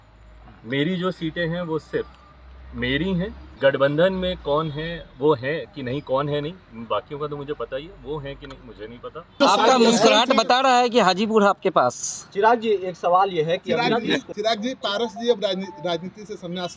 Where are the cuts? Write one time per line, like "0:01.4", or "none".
0:03.4
0:09.4
0:14.3